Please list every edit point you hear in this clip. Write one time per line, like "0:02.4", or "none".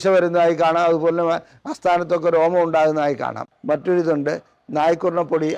0:03.5